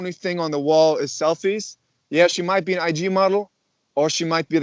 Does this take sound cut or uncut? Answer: uncut